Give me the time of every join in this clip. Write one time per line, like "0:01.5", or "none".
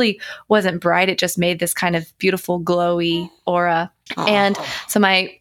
0:04.0